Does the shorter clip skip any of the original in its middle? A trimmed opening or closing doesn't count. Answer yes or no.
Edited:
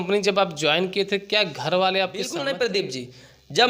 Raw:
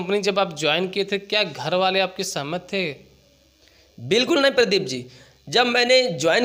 yes